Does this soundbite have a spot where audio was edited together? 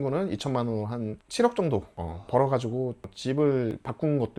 no; 0 cuts

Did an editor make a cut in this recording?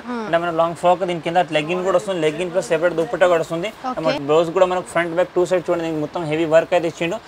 yes; 1 cut; at 4.2 s

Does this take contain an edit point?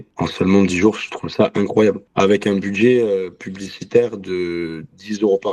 no; 0 cuts

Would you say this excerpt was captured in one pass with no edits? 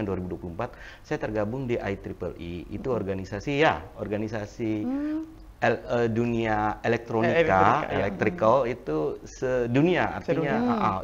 yes; 0 cuts

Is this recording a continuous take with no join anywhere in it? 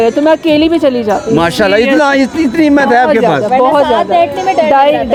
yes; 0 cuts

